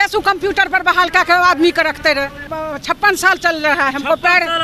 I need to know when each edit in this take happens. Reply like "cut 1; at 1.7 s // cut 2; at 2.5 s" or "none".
cut 1; at 2.5 s